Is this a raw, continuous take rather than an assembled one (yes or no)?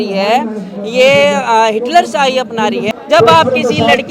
no